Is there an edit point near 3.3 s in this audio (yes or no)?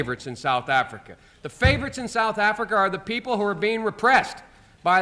no